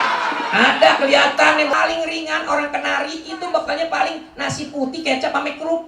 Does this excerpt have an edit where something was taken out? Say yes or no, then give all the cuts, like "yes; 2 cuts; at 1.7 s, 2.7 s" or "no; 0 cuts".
yes; 1 cut; at 1.7 s